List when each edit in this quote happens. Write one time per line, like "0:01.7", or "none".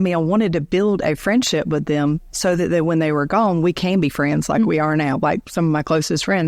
none

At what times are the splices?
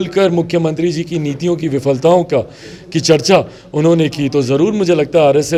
none

